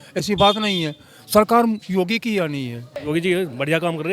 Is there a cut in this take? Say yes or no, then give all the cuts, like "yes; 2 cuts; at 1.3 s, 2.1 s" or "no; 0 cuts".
yes; 1 cut; at 2.9 s